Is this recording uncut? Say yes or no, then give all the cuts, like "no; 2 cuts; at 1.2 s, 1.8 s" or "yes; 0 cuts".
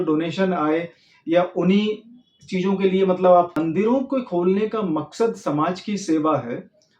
no; 1 cut; at 3.6 s